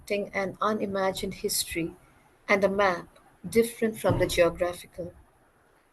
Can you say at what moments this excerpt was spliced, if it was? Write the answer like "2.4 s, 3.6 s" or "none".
none